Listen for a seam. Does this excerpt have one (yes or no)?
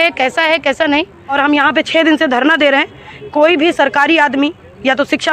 no